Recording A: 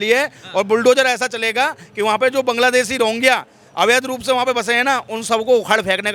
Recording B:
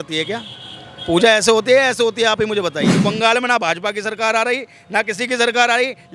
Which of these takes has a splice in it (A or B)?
B